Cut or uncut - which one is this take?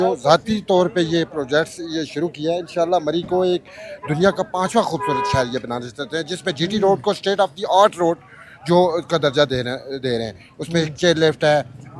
uncut